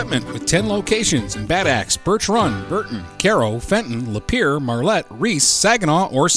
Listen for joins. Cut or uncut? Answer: uncut